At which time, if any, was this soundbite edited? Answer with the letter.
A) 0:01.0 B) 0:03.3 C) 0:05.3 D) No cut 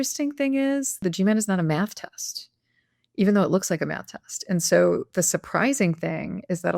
A